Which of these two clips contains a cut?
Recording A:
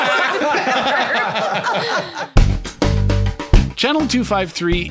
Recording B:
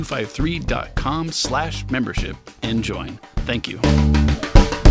A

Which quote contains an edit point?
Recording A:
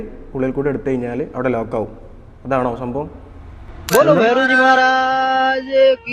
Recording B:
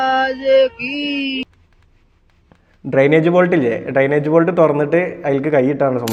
A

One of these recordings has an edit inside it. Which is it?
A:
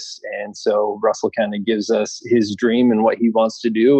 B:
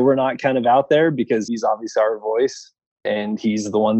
B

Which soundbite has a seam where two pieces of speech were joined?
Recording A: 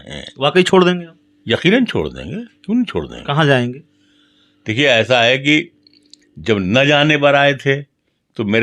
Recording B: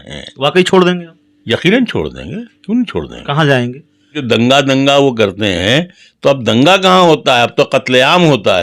B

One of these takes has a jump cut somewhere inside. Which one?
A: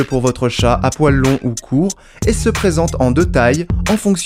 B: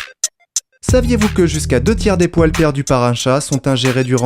B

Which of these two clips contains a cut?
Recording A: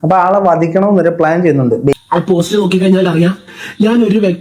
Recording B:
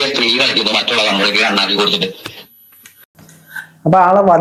A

